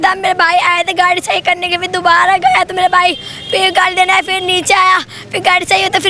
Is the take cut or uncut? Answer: uncut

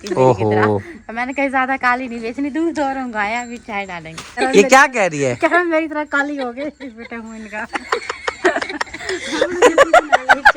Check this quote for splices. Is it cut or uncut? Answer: uncut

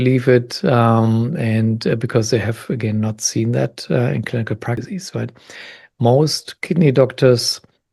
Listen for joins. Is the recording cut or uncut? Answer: cut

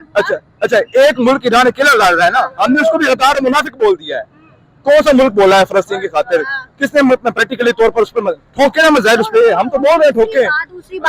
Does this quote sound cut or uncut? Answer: uncut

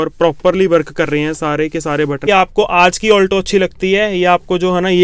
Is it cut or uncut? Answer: cut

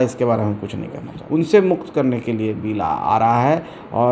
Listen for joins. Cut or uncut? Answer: cut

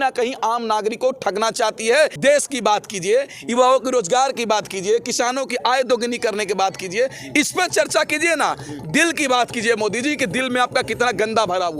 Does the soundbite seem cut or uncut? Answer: cut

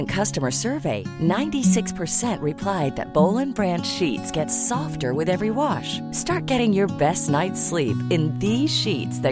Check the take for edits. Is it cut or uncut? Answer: uncut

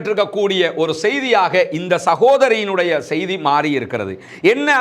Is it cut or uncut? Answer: uncut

